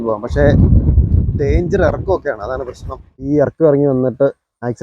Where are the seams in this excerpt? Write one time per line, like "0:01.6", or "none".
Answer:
0:03.3